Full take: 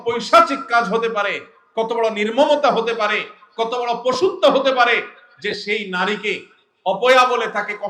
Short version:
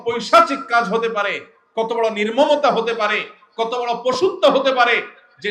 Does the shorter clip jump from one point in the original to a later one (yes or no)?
no